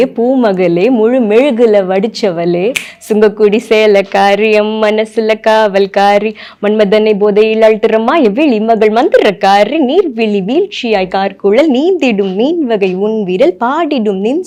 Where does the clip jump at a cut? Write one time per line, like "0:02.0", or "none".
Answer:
none